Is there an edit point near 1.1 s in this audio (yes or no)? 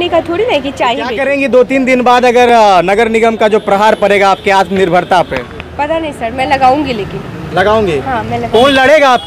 yes